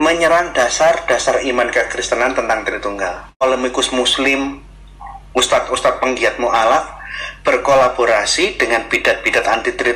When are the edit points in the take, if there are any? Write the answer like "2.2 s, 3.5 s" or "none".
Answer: 3.4 s

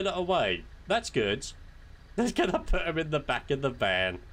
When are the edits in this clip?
none

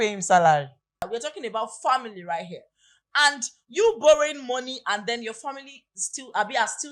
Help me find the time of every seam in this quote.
1.1 s

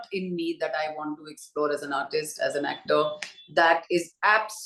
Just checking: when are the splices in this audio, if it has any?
none

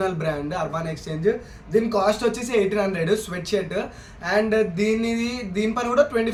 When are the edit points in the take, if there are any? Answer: none

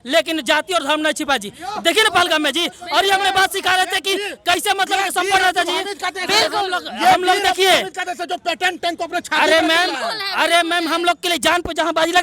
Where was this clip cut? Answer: none

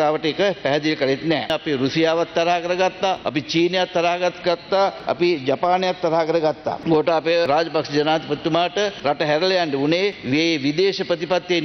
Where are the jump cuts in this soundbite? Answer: 1.5 s, 3.2 s, 5.0 s, 6.7 s, 7.5 s, 9.0 s, 10.2 s

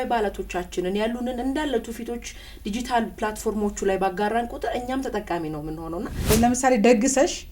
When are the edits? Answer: 6.3 s

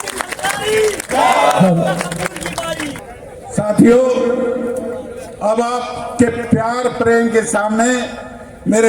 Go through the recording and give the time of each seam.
3.0 s

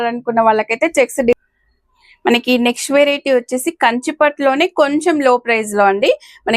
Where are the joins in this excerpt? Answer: 1.3 s

